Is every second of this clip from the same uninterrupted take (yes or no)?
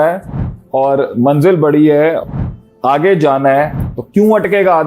no